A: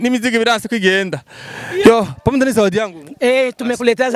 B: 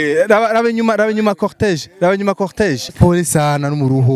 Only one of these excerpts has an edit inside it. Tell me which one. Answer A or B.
B